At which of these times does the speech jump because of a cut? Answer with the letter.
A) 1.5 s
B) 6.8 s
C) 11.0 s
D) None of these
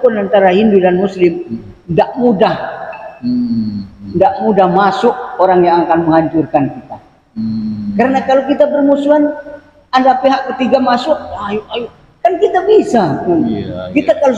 D